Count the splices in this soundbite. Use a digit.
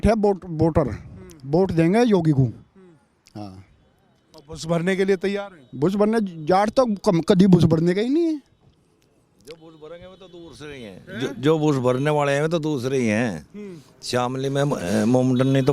0